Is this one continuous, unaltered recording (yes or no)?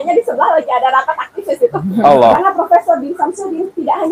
no